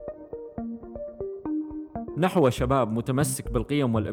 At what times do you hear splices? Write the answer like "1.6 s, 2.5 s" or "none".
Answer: 2.1 s